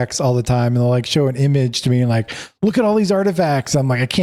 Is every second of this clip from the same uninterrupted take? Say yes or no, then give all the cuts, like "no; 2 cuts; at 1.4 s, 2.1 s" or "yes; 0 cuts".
yes; 0 cuts